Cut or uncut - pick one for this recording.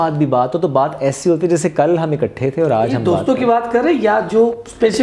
uncut